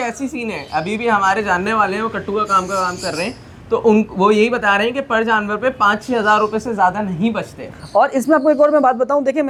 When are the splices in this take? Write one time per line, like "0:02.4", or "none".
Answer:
none